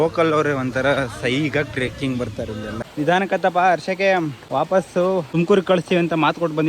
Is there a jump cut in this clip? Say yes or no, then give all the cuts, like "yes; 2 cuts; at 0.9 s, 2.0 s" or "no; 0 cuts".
yes; 3 cuts; at 2.8 s, 4.4 s, 5.3 s